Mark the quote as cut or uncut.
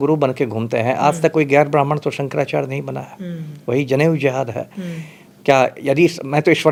uncut